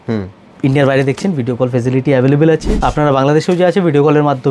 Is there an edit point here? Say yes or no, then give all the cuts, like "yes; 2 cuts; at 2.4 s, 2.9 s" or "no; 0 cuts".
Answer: yes; 1 cut; at 2.8 s